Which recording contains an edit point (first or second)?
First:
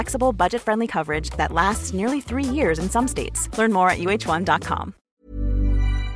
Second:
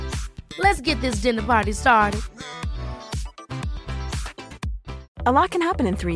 first